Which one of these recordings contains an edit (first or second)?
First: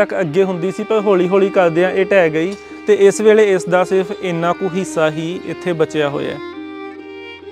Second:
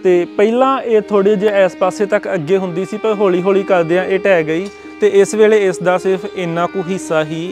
first